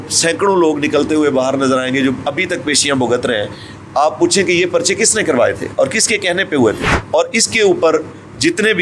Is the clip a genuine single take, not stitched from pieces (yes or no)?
no